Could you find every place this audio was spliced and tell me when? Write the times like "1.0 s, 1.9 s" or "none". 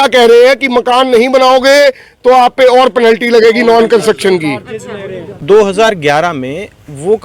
5.4 s

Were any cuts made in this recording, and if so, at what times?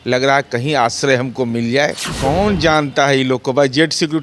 2.1 s

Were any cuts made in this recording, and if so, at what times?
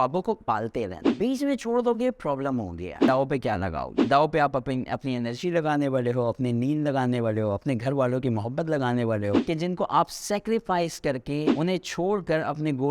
3.0 s

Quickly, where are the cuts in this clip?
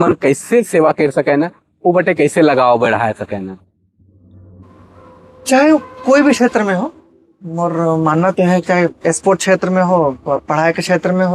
none

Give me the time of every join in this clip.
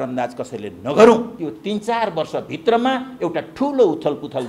1.3 s

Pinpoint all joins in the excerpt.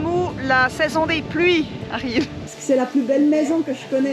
2.4 s

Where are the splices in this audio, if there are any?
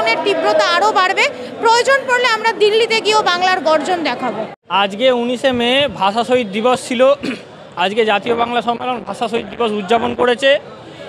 none

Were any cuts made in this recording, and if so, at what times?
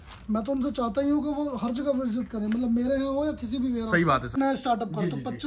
4.4 s

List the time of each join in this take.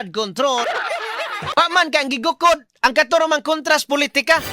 1.5 s

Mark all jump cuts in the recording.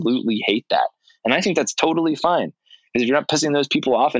none

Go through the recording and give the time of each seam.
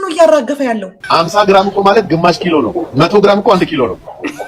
1.0 s

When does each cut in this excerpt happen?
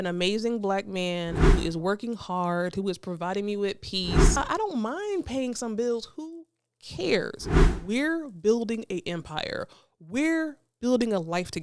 4.4 s, 7.7 s

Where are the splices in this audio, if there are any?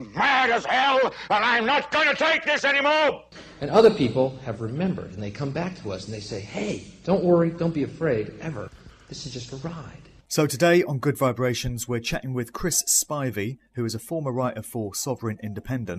none

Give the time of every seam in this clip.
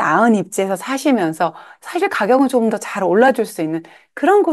1.7 s

